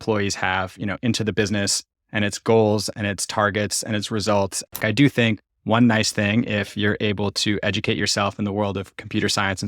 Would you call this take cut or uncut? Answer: cut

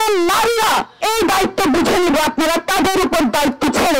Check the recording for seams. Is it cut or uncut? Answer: cut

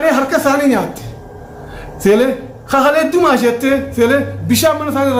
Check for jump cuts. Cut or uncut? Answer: uncut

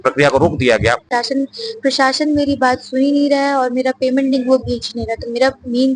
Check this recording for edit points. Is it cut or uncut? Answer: cut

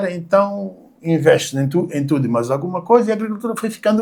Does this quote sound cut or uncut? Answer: uncut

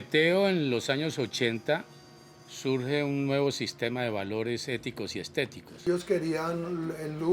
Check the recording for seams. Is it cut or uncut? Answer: cut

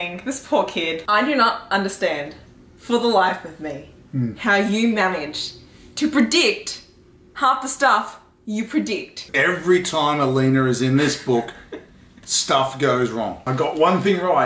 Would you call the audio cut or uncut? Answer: cut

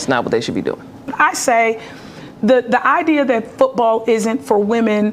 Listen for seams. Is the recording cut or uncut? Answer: cut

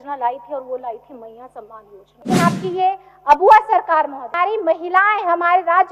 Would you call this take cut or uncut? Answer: cut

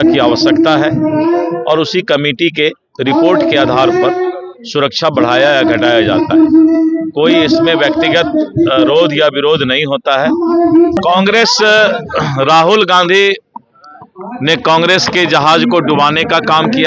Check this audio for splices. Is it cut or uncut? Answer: cut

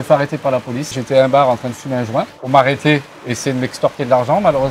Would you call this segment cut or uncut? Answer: cut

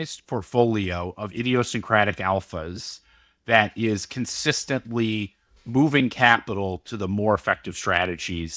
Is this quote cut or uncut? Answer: uncut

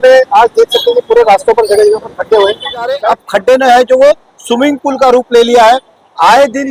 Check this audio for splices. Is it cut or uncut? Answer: cut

